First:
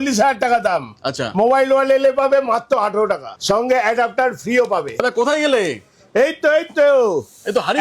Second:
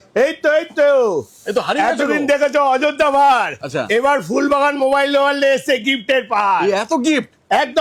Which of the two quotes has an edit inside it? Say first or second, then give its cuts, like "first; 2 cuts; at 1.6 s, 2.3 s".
first; 2 cuts; at 3.3 s, 4.9 s